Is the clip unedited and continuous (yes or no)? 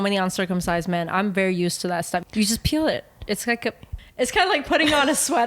no